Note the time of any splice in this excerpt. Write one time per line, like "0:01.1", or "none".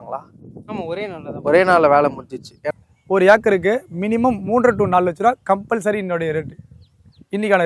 0:02.7